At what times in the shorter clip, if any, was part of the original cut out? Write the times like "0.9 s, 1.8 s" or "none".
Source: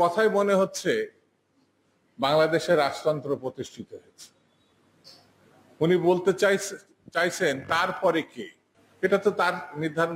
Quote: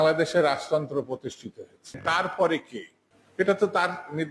2.0 s